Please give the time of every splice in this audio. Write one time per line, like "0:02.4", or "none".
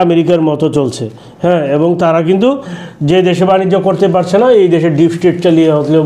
none